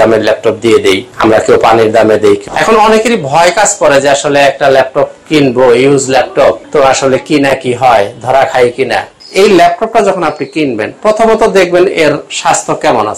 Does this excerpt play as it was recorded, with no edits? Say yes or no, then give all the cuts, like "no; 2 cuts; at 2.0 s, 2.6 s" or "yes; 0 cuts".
no; 4 cuts; at 1.1 s, 2.4 s, 6.6 s, 9.2 s